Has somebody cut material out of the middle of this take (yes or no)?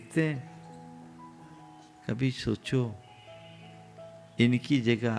no